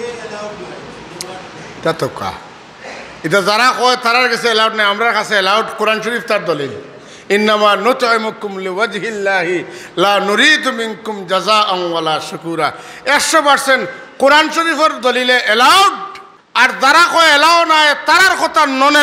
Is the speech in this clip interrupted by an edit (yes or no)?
yes